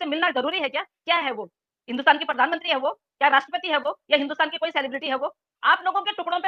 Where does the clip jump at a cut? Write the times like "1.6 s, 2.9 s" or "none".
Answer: none